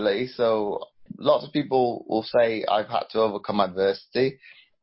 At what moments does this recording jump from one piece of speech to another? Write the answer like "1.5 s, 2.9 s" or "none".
1.0 s